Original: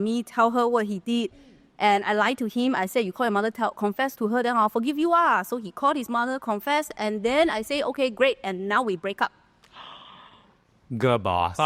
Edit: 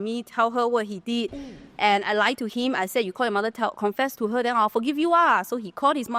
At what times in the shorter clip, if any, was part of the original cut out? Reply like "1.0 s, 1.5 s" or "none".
none